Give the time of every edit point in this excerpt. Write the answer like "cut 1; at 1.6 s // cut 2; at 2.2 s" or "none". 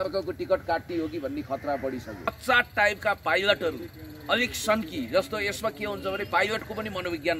cut 1; at 2.4 s

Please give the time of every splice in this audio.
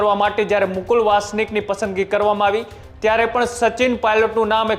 none

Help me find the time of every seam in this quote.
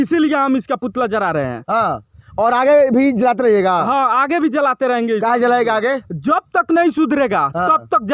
none

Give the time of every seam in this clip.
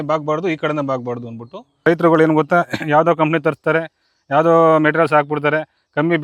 cut 1; at 1.7 s

